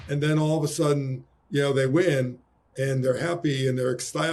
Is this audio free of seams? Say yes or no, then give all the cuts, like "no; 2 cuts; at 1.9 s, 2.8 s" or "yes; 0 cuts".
yes; 0 cuts